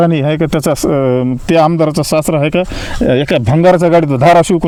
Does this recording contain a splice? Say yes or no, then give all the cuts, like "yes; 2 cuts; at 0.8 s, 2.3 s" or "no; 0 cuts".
no; 0 cuts